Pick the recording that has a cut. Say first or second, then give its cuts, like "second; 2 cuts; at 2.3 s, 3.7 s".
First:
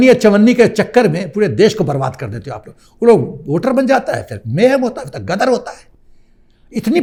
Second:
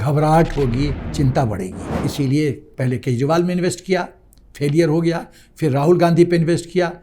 second; 2 cuts; at 1.0 s, 1.8 s